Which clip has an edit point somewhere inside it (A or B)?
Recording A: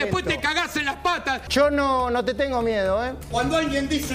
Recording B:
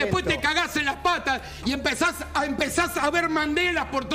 A